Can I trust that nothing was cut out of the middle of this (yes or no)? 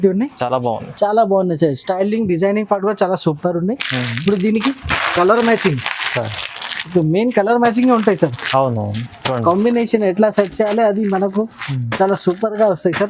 yes